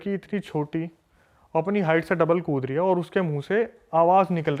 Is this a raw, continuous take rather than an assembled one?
yes; 0 cuts

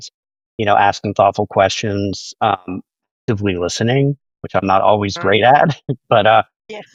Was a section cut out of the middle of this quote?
no; 0 cuts

